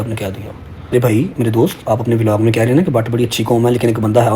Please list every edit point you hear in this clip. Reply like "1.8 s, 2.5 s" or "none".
0.9 s